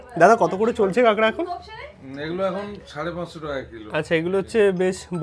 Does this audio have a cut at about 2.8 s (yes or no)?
no